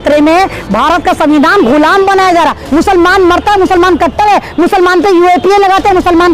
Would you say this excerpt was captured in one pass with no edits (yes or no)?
no